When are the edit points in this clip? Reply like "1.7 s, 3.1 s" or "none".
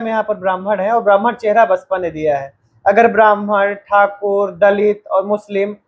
none